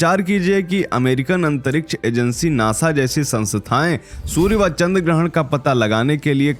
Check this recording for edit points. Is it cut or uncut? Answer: uncut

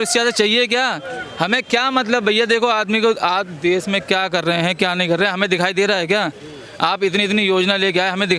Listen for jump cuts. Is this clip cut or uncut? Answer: uncut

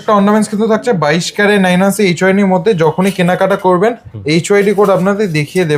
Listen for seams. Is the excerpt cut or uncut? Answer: uncut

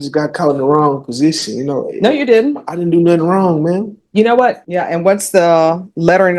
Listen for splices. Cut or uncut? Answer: cut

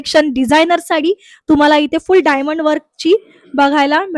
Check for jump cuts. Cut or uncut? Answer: uncut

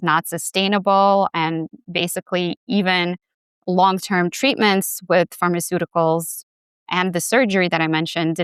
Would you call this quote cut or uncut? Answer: uncut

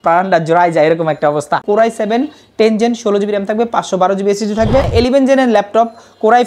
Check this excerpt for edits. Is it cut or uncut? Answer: cut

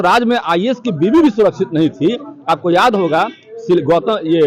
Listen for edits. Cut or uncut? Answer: uncut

